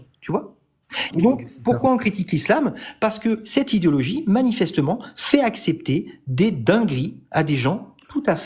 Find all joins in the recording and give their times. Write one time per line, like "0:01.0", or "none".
none